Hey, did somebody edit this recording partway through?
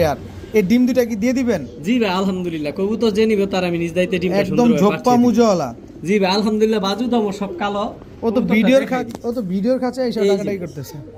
no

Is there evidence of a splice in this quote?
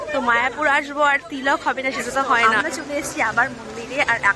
yes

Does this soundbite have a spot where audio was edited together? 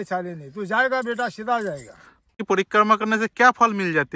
yes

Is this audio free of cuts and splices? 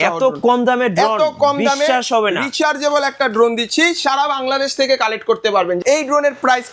no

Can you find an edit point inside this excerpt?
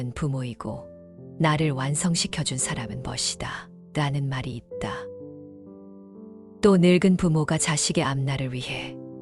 yes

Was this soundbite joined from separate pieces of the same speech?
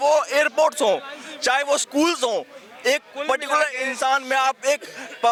no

